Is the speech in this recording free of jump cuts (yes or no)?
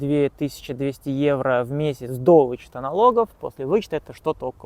yes